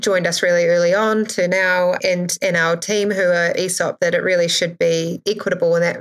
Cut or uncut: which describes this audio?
uncut